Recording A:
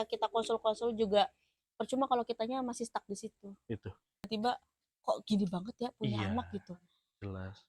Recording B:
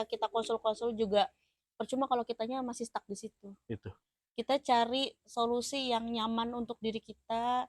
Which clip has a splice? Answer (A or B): A